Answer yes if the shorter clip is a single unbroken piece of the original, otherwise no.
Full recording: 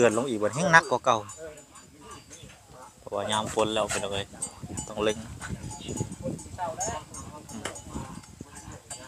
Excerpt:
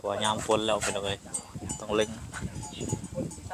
yes